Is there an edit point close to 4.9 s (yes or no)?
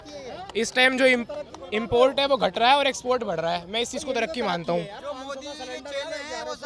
no